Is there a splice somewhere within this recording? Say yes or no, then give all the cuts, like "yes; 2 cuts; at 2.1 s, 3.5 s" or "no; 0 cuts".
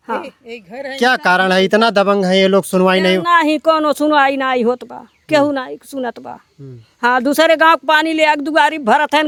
no; 0 cuts